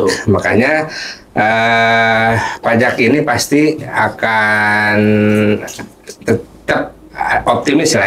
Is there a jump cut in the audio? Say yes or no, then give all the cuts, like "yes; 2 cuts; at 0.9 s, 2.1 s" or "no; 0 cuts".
no; 0 cuts